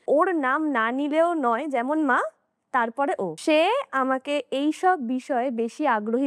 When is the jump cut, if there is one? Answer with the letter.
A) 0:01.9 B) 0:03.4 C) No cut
B